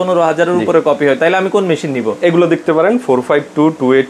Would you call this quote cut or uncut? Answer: uncut